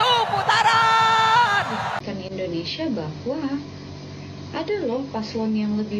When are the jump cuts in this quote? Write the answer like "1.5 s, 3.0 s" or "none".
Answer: 2.0 s